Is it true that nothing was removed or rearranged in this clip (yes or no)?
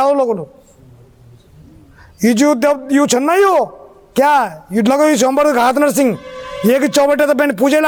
yes